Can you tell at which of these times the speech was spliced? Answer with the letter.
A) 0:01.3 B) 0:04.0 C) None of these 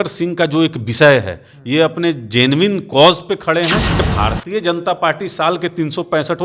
B